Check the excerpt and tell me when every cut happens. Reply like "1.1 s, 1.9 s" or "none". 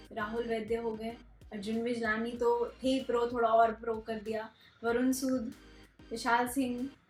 none